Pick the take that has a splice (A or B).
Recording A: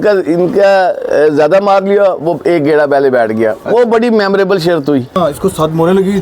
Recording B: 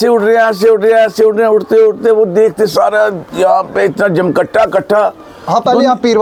A